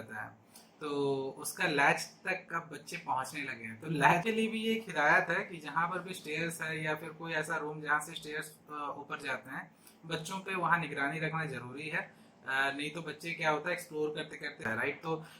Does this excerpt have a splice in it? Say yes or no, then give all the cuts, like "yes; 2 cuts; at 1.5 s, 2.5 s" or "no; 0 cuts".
yes; 2 cuts; at 4.2 s, 14.6 s